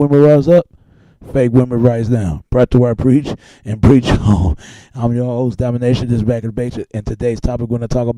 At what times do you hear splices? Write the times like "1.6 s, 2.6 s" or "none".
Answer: none